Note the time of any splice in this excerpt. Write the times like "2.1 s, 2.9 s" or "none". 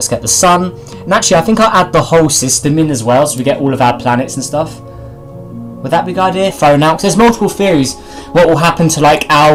none